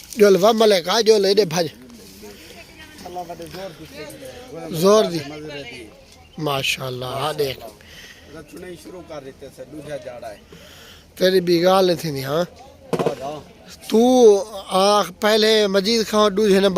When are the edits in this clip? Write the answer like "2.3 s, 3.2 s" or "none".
3.0 s